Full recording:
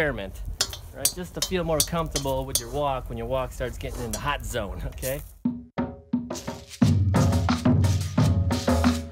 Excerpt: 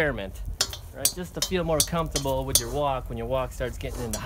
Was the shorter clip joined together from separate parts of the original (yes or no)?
no